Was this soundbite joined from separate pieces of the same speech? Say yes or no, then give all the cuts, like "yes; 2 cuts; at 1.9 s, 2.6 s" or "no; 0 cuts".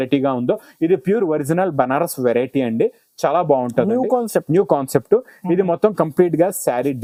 no; 0 cuts